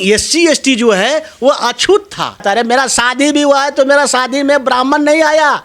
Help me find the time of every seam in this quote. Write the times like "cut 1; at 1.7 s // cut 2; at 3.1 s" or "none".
cut 1; at 2.4 s